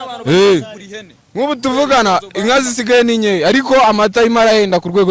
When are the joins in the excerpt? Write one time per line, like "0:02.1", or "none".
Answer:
none